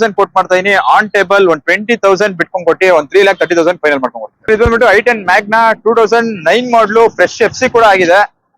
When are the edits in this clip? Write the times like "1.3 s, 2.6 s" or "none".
4.5 s